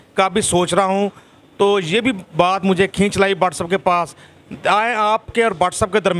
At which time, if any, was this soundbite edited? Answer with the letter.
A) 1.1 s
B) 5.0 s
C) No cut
C